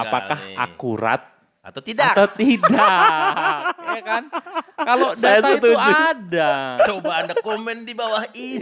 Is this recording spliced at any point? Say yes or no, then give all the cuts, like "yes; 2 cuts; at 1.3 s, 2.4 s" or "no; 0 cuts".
no; 0 cuts